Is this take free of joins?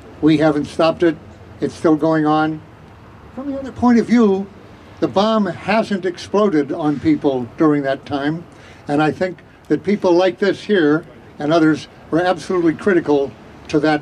yes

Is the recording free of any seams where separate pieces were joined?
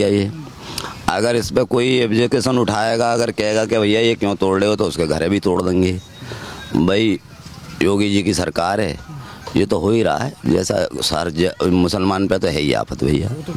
yes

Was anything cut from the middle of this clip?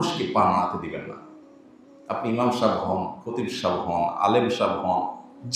no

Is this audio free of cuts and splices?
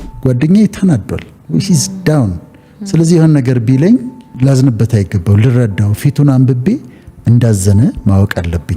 no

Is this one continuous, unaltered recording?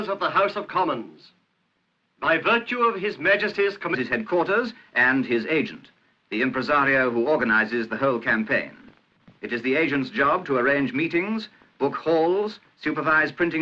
yes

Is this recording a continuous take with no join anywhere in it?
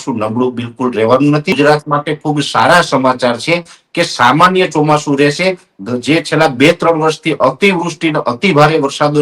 no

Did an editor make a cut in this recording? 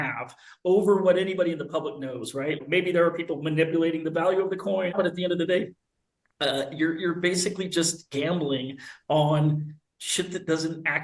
yes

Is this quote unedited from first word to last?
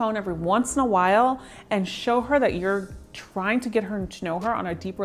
yes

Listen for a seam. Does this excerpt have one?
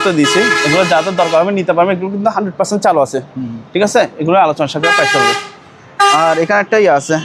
no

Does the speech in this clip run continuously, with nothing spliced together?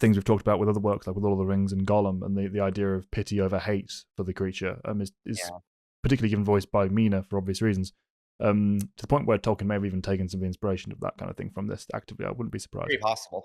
yes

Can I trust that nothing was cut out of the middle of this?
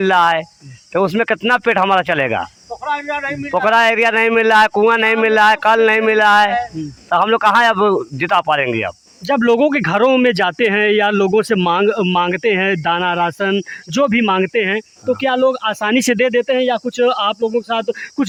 yes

